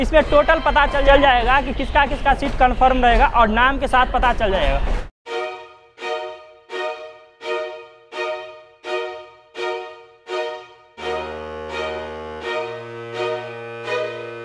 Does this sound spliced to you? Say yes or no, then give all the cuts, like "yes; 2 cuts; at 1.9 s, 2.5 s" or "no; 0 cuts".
no; 0 cuts